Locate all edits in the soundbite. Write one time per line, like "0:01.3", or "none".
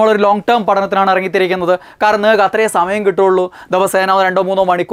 none